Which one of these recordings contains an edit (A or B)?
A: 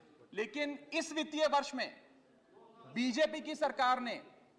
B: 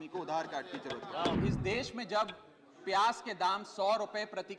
B